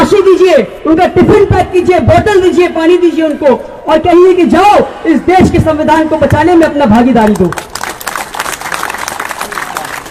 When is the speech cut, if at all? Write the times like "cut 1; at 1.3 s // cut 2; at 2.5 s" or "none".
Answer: none